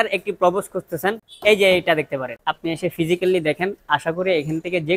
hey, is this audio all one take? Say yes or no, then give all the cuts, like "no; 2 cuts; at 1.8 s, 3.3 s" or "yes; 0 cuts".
no; 1 cut; at 2.4 s